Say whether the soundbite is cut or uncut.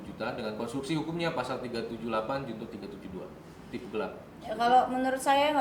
uncut